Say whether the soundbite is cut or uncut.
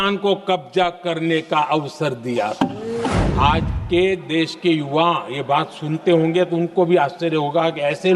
cut